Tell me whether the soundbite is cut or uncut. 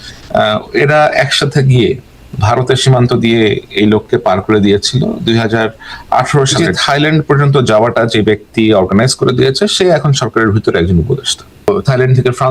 cut